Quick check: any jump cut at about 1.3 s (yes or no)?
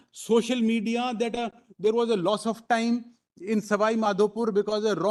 no